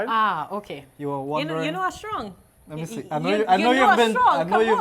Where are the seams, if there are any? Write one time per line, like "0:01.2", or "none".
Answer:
none